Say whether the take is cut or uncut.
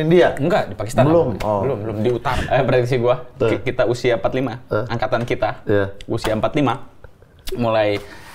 cut